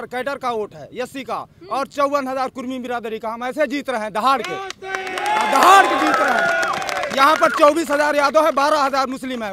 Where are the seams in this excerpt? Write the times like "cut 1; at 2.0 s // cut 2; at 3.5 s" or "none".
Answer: none